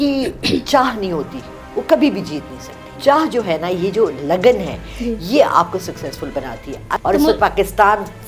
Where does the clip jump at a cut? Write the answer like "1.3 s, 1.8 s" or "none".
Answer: 3.0 s, 7.0 s